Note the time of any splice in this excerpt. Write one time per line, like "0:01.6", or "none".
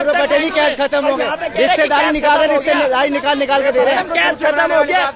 none